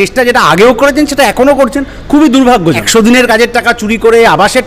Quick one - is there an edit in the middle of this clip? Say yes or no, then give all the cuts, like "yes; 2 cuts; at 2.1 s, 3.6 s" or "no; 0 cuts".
yes; 1 cut; at 2.8 s